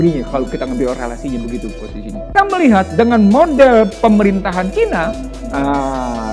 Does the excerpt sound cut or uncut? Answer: cut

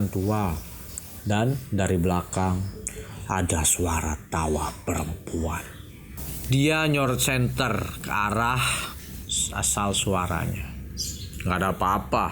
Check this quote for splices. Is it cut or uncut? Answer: cut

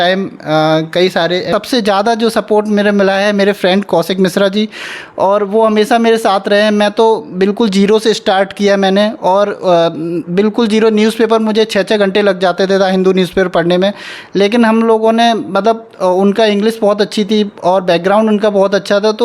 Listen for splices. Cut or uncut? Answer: cut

